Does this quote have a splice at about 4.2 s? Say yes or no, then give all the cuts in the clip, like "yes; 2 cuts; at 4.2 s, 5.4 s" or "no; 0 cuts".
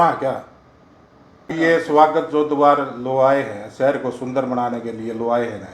no; 1 cut; at 1.5 s